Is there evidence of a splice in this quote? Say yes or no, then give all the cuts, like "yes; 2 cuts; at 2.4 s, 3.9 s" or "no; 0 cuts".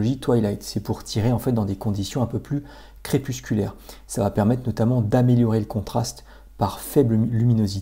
no; 0 cuts